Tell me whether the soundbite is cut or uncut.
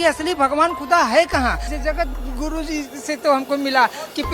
cut